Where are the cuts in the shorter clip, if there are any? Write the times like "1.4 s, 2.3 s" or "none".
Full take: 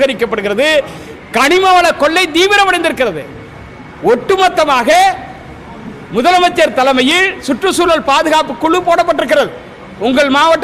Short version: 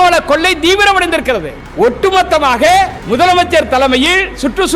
1.6 s, 3.0 s